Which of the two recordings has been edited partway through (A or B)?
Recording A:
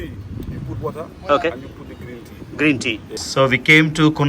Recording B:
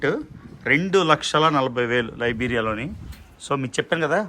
A